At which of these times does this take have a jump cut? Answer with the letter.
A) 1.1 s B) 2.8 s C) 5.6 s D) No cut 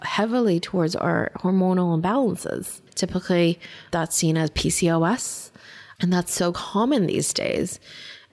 B